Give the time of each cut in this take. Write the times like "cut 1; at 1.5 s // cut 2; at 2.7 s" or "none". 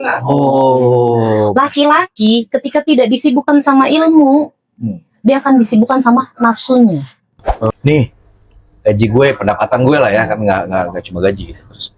cut 1; at 7.7 s